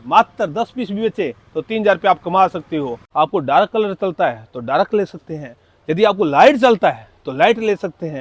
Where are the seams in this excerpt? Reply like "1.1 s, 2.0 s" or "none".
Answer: 3.0 s